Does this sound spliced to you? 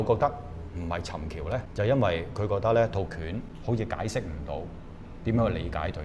yes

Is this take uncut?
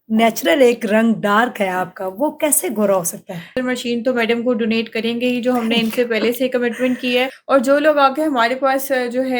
no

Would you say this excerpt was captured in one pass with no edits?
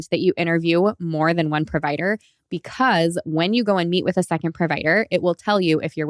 yes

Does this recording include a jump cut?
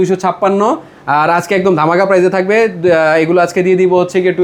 no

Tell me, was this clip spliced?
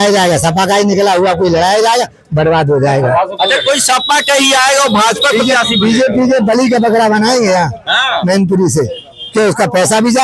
no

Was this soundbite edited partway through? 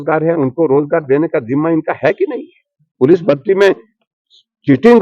yes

